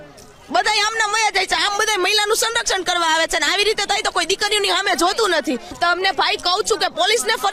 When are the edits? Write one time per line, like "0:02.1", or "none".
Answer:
none